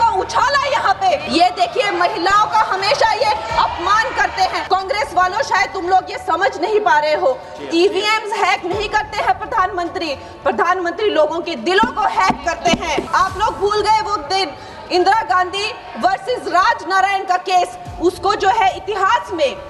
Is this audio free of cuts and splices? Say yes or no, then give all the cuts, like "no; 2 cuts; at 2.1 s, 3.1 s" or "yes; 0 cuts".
no; 3 cuts; at 1.2 s, 4.6 s, 13.1 s